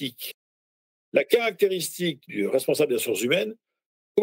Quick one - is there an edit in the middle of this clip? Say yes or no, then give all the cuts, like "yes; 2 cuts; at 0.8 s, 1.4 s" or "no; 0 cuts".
no; 0 cuts